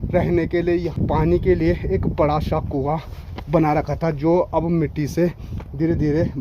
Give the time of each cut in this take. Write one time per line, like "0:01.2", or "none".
0:01.0